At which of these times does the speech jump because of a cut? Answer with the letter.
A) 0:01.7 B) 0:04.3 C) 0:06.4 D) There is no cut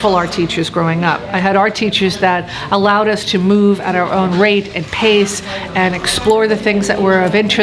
D